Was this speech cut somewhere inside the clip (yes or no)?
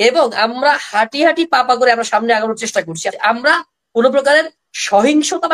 yes